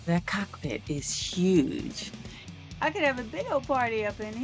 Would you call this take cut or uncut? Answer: uncut